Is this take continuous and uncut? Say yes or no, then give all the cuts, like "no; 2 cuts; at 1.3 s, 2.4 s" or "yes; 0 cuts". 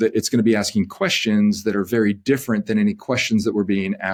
yes; 0 cuts